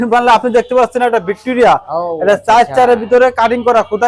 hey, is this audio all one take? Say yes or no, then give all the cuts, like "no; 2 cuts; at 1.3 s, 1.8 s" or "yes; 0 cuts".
yes; 0 cuts